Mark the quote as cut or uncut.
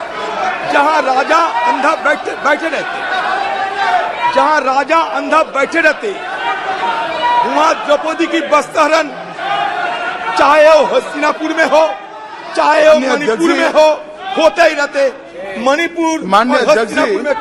uncut